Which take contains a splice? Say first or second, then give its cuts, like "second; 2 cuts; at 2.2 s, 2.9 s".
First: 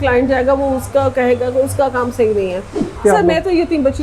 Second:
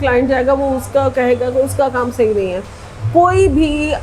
first; 1 cut; at 2.9 s